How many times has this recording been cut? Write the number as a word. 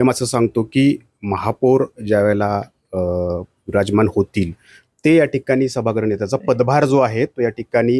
zero